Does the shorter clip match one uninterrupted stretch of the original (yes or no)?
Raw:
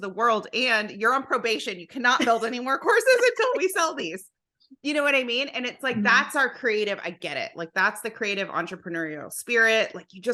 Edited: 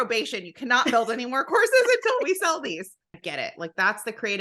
no